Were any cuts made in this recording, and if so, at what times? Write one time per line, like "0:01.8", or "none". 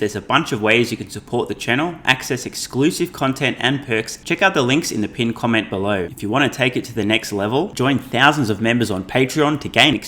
0:04.1
0:06.1